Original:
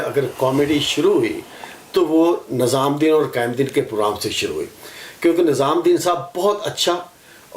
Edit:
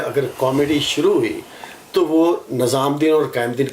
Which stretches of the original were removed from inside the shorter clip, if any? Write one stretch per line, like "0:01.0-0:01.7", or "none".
none